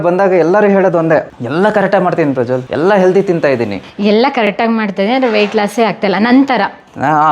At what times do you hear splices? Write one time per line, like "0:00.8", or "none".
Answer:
0:03.8